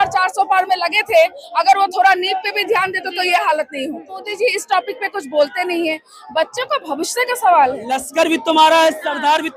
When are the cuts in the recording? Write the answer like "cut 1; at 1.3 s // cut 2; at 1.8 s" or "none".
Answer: cut 1; at 4.3 s // cut 2; at 7.8 s